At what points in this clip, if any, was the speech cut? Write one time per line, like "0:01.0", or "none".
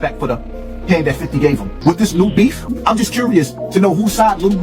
0:01.7
0:02.7